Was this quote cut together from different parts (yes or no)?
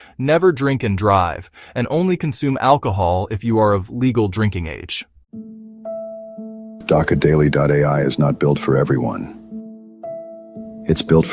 yes